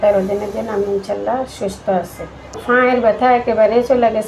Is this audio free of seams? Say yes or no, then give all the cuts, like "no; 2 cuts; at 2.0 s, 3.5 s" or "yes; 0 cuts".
no; 1 cut; at 2.6 s